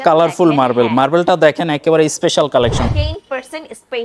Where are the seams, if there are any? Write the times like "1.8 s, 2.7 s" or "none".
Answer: 2.8 s